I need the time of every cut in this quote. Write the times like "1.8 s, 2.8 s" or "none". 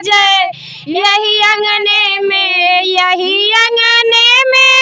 none